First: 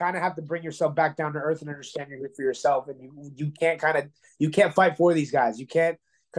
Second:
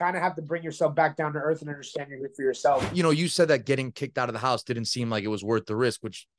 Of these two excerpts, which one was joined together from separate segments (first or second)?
second